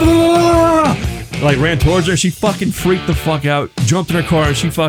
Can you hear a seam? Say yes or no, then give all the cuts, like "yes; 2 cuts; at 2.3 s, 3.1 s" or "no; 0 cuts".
no; 0 cuts